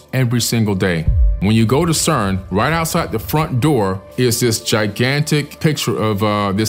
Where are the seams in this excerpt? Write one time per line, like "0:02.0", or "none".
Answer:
0:01.4